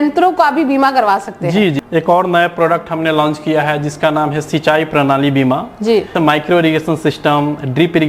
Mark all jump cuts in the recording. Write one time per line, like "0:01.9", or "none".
0:01.8
0:06.1